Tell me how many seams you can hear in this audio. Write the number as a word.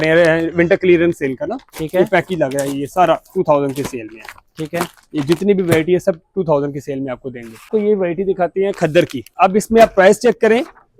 two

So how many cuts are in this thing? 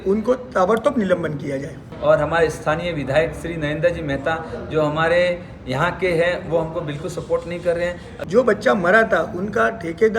two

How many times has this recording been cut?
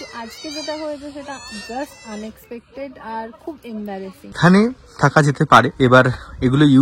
two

